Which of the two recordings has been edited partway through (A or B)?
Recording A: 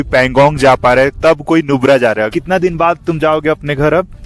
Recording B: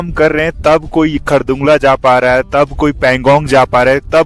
A